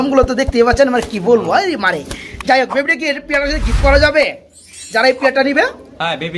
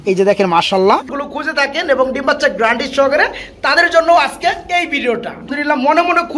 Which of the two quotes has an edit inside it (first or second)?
second